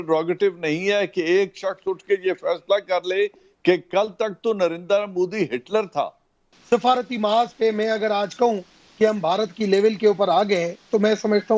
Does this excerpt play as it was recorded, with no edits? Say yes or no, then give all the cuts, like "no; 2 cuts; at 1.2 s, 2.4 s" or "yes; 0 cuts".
no; 1 cut; at 6.5 s